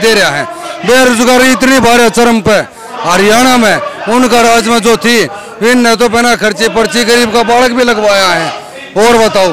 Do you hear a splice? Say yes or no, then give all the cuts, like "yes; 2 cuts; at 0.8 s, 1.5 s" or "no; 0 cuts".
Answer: no; 0 cuts